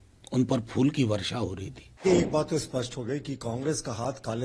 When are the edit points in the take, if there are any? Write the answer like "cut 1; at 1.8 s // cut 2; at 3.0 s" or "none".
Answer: cut 1; at 2.0 s